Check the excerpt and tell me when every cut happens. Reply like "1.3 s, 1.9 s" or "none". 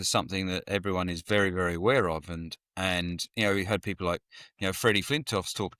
none